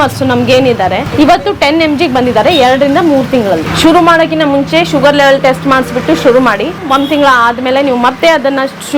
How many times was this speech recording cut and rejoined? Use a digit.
3